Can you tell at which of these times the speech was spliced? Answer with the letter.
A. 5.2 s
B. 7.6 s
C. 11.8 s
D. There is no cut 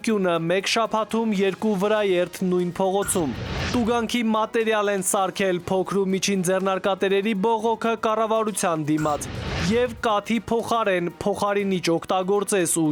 D